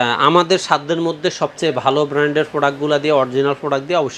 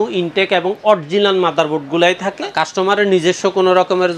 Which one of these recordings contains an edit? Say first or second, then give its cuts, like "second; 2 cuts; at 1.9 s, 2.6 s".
second; 1 cut; at 2.4 s